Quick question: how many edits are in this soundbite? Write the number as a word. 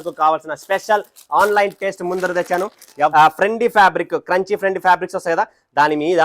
one